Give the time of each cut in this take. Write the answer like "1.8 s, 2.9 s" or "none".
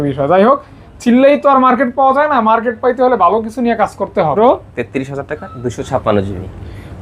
4.3 s